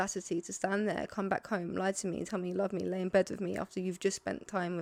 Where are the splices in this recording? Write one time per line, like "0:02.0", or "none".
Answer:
none